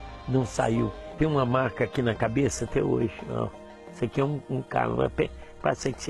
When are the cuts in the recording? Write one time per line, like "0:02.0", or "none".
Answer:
0:01.1